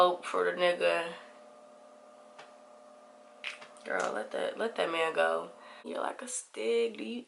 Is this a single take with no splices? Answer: no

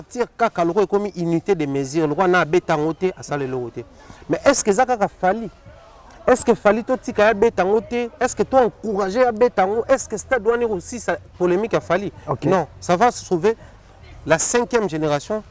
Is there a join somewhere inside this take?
no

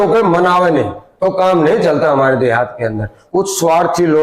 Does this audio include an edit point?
yes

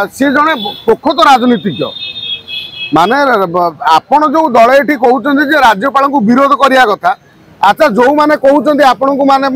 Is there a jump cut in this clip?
no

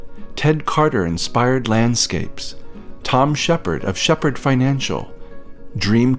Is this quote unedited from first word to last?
yes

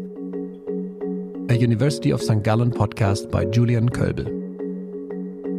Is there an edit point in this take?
no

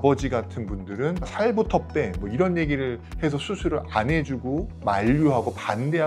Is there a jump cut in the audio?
no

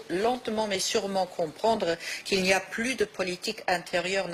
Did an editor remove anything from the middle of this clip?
no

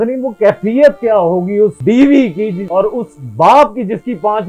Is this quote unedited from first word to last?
no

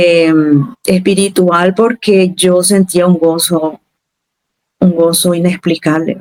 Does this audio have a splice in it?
no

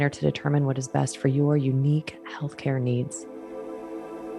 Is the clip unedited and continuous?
no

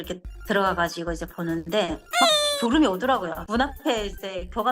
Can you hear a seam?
yes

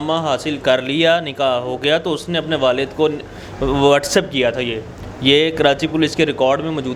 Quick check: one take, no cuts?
yes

